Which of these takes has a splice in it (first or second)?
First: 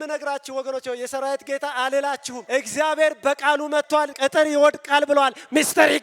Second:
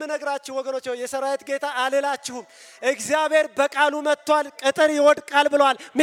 first